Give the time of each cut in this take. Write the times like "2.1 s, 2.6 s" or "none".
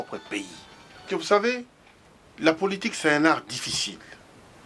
1.1 s